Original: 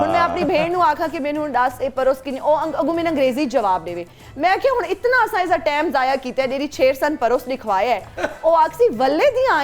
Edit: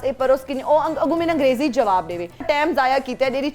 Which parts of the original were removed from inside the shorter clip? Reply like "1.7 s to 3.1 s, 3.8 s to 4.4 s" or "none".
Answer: 4.2 s to 5.6 s